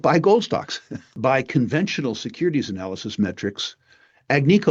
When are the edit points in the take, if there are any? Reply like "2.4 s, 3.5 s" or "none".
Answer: 1.2 s